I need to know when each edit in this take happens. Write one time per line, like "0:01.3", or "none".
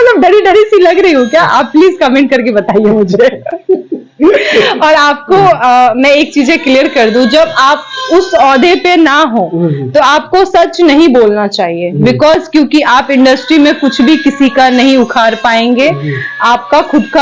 none